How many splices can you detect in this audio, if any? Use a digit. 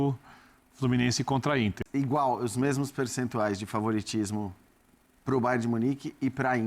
1